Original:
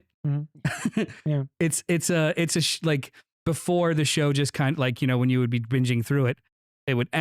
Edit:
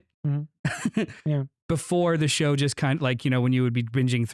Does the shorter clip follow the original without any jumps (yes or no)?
no